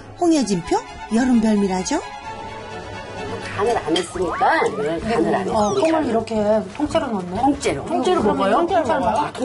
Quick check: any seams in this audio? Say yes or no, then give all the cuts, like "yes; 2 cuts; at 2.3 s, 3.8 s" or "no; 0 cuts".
yes; 2 cuts; at 3.5 s, 4.9 s